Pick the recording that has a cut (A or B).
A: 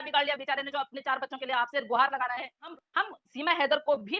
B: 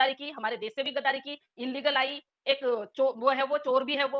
A